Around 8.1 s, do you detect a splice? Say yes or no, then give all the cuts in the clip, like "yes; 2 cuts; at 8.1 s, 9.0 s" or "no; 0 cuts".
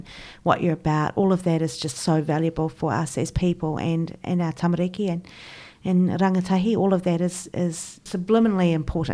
yes; 1 cut; at 8.1 s